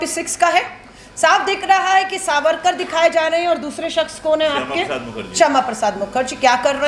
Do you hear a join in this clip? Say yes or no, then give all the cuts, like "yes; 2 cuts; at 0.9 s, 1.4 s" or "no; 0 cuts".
no; 0 cuts